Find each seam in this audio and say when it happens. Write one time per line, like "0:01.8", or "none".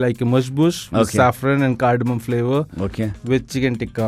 none

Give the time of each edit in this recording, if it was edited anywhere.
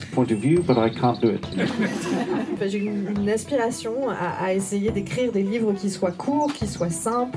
0:01.5
0:02.6

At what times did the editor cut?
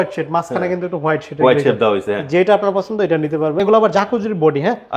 0:03.6

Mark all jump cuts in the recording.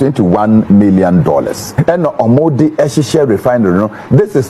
0:01.7

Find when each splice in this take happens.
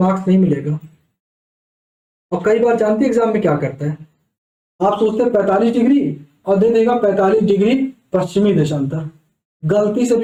none

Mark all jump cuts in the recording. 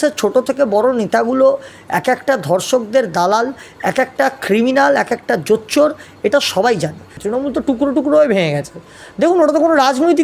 0:07.1

